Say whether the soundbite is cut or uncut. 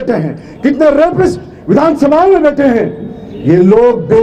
uncut